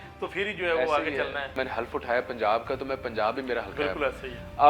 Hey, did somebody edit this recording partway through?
yes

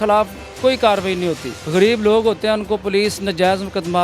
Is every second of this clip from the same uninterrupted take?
no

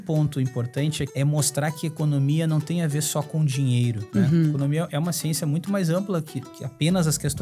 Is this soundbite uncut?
no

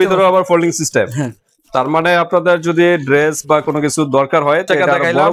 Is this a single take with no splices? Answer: yes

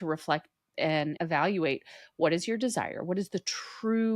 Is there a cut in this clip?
yes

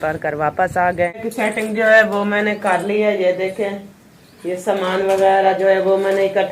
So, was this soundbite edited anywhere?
yes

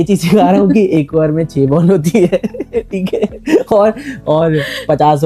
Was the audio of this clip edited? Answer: no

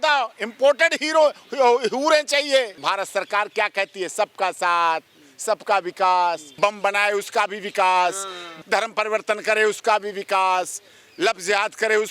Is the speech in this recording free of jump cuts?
no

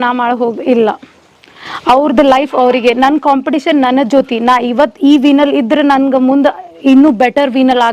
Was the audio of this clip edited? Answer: no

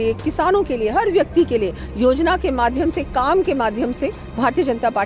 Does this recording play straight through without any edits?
yes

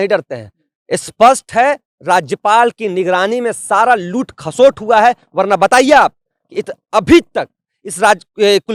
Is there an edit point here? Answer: no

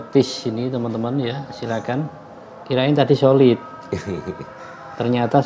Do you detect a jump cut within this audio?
no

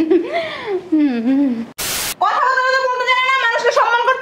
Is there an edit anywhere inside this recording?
yes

